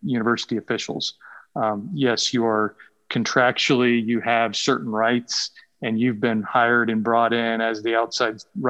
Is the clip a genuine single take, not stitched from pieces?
yes; 0 cuts

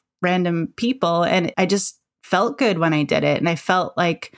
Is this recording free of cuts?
no; 1 cut; at 1.5 s

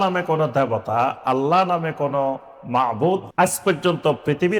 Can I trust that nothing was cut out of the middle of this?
no; 1 cut; at 3.3 s

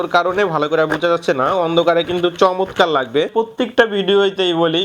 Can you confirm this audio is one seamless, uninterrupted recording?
no; 1 cut; at 3.3 s

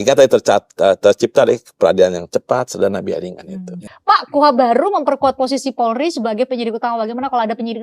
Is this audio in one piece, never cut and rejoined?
no; 1 cut; at 3.8 s

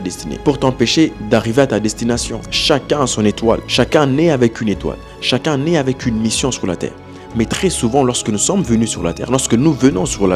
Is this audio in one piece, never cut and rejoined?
yes; 0 cuts

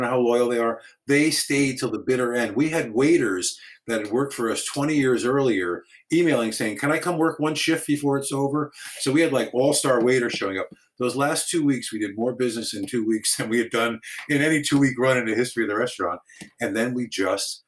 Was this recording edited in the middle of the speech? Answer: no; 0 cuts

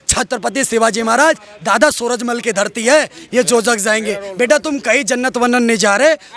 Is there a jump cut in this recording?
yes; 1 cut; at 3.2 s

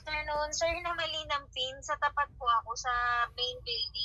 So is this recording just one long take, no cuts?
yes; 0 cuts

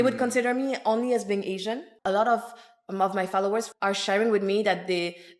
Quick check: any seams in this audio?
yes; 2 cuts; at 2.0 s, 3.7 s

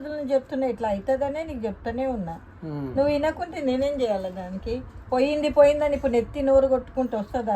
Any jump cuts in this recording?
no; 0 cuts

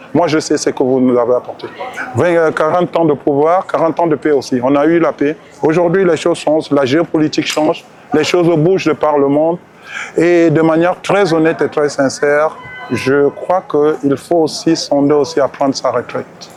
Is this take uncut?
yes; 0 cuts

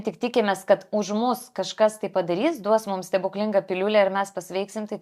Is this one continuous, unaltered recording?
yes; 0 cuts

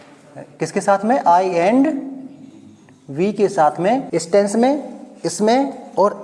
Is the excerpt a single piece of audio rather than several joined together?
no; 1 cut; at 4.1 s

